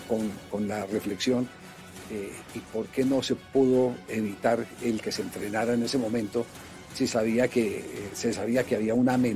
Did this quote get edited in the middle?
no; 0 cuts

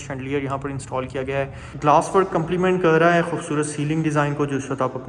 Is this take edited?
yes; 1 cut; at 1.6 s

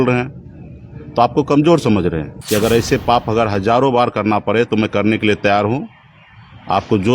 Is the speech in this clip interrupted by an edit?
yes; 1 cut; at 2.3 s

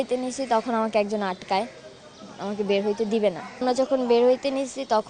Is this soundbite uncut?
no; 1 cut; at 3.6 s

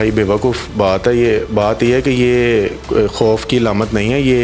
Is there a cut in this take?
no; 0 cuts

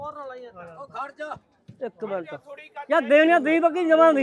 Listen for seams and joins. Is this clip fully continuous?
yes; 0 cuts

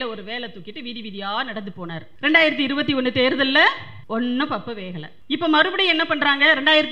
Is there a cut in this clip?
yes; 3 cuts; at 2.1 s, 3.9 s, 5.1 s

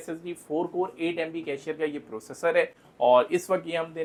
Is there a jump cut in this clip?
no; 0 cuts

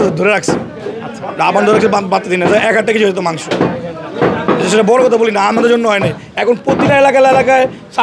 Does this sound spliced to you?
no; 0 cuts

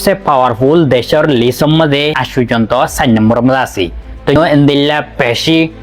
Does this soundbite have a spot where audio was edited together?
yes; 2 cuts; at 2.2 s, 4.4 s

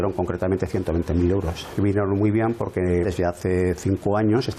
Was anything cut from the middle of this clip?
no; 0 cuts

